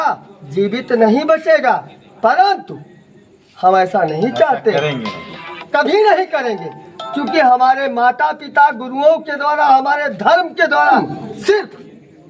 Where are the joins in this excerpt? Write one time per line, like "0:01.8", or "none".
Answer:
0:11.1